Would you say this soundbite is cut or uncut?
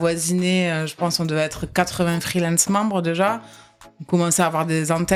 uncut